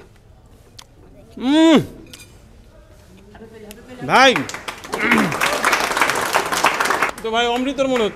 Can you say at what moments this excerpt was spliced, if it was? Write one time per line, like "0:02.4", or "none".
0:07.1